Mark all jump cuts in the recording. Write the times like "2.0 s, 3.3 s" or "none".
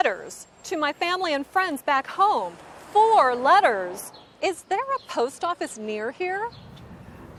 none